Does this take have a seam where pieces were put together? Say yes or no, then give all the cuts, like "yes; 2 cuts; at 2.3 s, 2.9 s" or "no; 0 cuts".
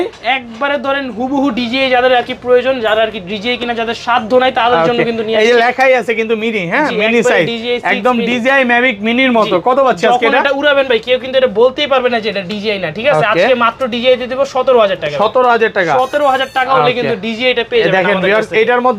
no; 0 cuts